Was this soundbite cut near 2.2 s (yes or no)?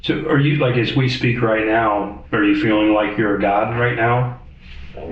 yes